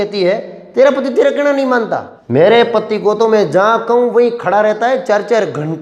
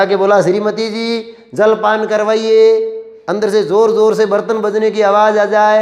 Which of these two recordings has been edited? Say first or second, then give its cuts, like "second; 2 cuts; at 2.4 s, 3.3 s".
first; 1 cut; at 2.1 s